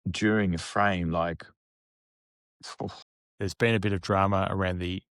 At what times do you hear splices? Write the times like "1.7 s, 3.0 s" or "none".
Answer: 3.1 s